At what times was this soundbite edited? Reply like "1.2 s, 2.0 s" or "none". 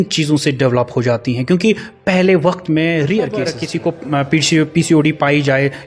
3.6 s